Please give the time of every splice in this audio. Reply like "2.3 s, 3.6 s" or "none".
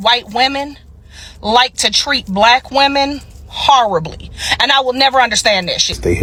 none

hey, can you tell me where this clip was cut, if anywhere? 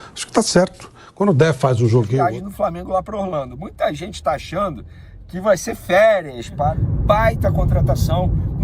2.1 s, 6.8 s

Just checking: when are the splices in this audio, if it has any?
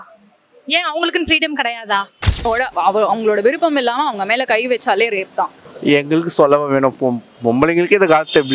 2.5 s, 5.6 s

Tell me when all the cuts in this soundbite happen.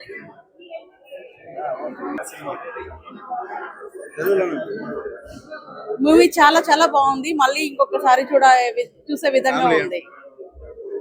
7.6 s

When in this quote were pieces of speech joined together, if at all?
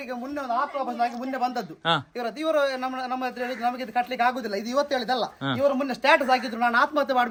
none

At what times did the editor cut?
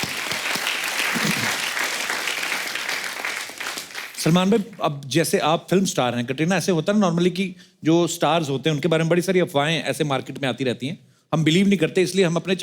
none

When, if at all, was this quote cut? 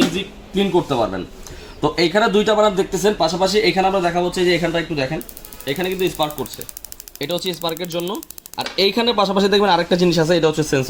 none

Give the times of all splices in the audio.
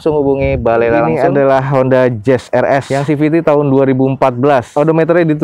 1.2 s

